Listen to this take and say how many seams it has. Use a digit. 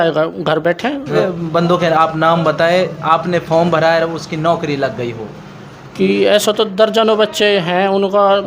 1